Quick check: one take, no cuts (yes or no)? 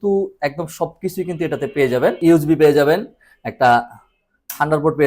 no